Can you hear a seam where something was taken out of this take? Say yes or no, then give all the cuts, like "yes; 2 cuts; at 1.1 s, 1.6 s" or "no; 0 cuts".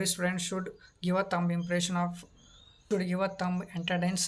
no; 0 cuts